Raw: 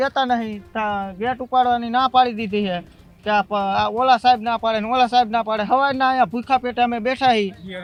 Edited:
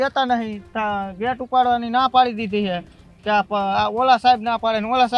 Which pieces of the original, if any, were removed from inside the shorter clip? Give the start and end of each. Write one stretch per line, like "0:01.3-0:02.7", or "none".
none